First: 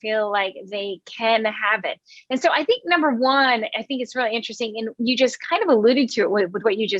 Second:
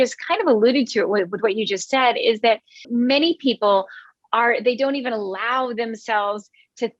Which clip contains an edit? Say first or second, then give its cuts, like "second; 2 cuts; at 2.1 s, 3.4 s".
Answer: second; 1 cut; at 2.7 s